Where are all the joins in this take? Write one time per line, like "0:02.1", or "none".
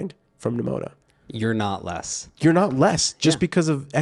none